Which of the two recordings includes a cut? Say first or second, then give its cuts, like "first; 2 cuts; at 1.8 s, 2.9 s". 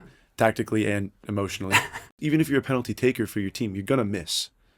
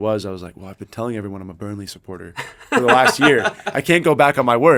first; 1 cut; at 2.2 s